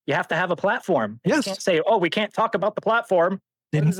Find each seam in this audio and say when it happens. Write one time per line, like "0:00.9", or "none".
none